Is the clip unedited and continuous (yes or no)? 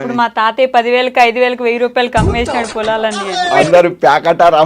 no